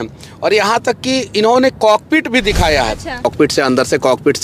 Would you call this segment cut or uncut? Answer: cut